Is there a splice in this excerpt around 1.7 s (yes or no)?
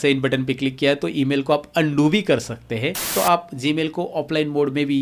no